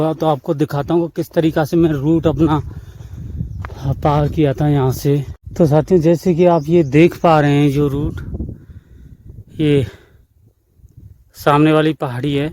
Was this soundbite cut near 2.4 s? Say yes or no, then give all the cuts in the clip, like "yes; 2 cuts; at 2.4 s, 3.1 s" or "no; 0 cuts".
no; 1 cut; at 5.4 s